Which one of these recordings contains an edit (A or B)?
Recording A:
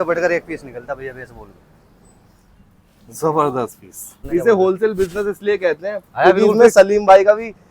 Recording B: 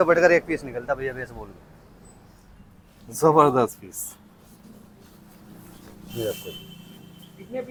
A